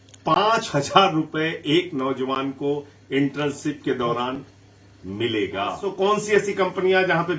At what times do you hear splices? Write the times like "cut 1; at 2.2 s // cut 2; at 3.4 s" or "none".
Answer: cut 1; at 5.8 s